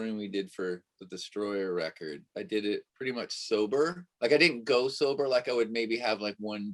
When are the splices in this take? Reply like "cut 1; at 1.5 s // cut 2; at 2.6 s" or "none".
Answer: none